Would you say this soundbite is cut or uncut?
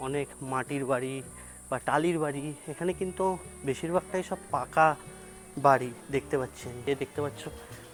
uncut